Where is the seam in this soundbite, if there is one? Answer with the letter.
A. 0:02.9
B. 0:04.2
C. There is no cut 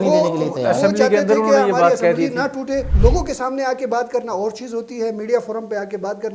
A